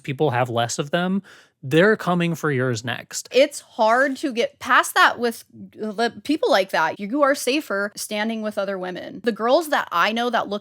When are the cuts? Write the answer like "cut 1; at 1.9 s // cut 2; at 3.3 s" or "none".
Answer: cut 1; at 3.3 s // cut 2; at 6.9 s // cut 3; at 8.0 s // cut 4; at 9.2 s